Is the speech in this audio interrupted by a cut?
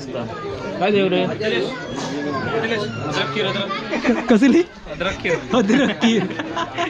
no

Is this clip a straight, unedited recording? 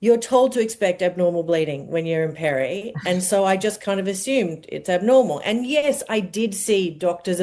yes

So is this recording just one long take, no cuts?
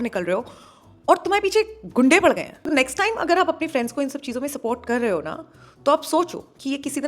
no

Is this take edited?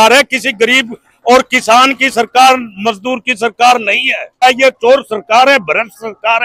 yes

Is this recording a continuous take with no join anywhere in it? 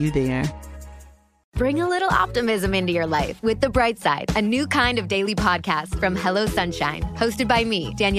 yes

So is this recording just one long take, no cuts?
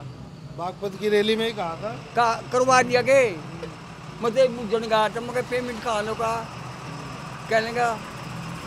yes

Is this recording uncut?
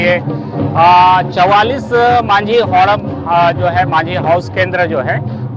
yes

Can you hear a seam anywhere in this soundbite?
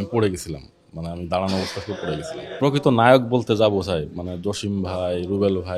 yes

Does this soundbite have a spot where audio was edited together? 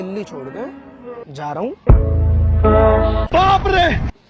yes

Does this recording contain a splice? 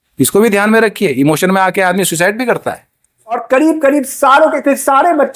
yes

